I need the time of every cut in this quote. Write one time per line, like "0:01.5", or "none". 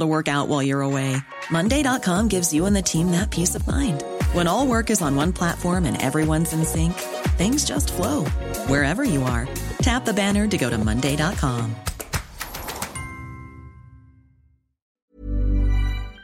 0:14.8

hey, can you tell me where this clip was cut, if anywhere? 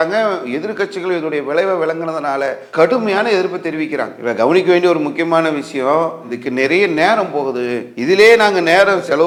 none

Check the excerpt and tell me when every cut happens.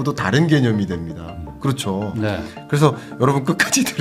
none

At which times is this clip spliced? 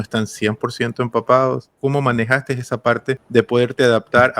0:01.7
0:03.2

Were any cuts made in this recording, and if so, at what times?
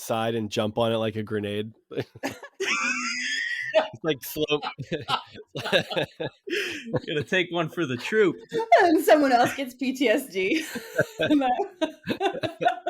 0:06.4

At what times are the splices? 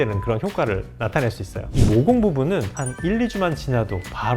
0:01.7

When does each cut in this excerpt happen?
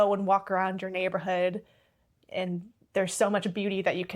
none

